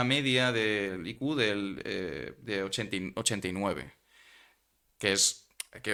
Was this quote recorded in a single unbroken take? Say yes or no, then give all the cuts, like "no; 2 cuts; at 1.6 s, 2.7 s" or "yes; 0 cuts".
yes; 0 cuts